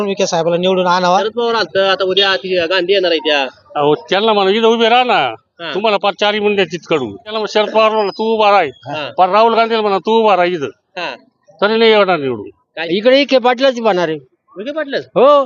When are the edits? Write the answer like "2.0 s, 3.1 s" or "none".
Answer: 1.3 s, 7.3 s, 12.7 s